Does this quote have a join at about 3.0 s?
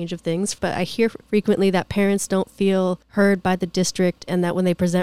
yes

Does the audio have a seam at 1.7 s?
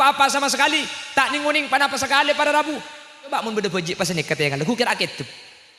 no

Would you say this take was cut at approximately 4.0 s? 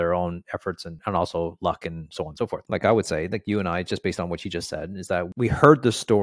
no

